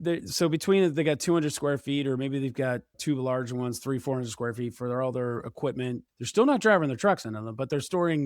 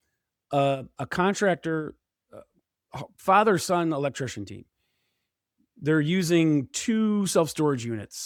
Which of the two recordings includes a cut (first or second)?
first